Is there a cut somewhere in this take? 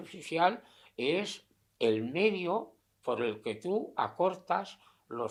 no; 0 cuts

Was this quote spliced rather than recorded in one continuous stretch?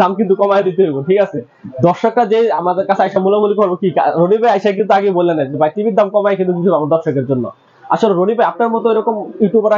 no; 0 cuts

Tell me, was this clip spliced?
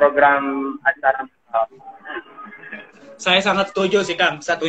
no; 0 cuts

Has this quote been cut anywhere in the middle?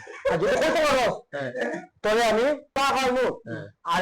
yes; 1 cut; at 2.7 s

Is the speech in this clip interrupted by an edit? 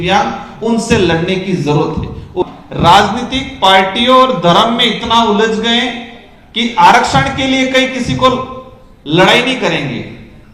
yes; 1 cut; at 2.4 s

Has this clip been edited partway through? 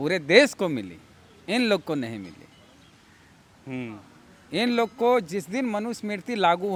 no; 0 cuts

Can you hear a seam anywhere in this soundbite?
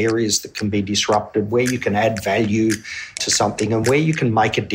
yes; 1 cut; at 3.2 s

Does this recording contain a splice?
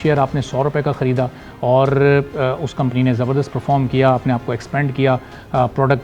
no; 0 cuts

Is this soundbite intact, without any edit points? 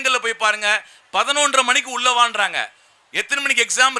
yes; 0 cuts

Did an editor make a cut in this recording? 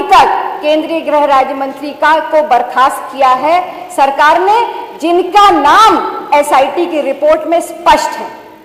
no; 0 cuts

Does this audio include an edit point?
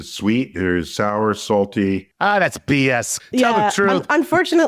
yes; 2 cuts; at 2.1 s, 3.2 s

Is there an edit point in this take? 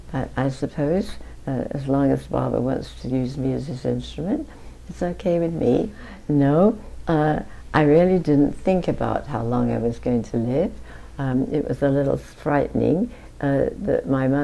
yes; 1 cut; at 6.1 s

